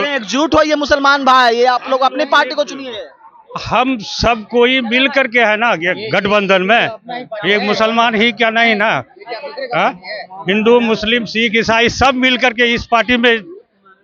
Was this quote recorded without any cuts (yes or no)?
yes